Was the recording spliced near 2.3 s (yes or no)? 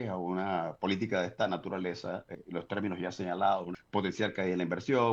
yes